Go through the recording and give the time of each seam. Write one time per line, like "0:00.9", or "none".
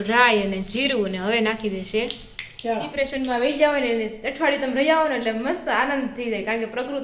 0:02.9